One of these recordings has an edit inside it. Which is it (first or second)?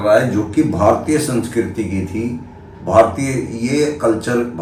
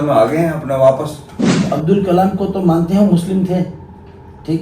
second